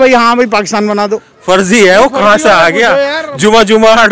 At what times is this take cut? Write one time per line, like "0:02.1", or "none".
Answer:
0:01.3